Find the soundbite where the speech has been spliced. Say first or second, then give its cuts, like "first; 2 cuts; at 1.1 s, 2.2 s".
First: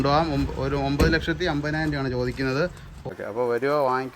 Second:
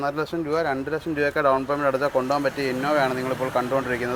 first; 1 cut; at 3.0 s